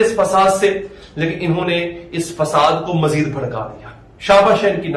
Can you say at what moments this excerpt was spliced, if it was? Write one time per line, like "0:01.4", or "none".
none